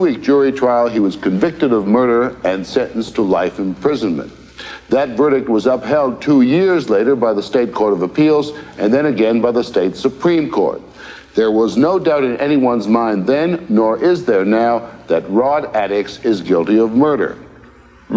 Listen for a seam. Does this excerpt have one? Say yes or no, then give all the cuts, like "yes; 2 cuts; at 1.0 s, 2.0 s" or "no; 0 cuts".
yes; 1 cut; at 13.4 s